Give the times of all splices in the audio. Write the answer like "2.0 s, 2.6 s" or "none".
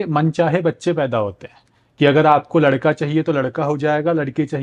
none